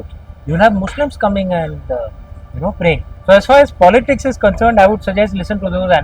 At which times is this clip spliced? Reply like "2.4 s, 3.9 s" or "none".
3.1 s